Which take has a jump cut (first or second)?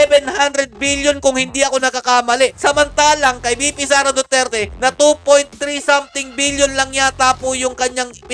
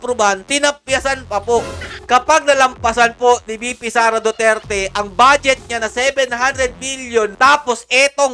second